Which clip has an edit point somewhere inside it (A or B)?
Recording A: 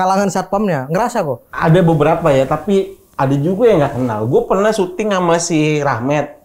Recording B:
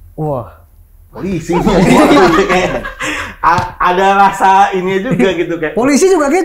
A